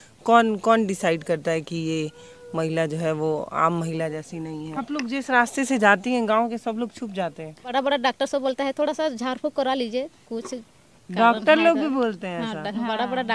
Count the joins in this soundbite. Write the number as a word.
two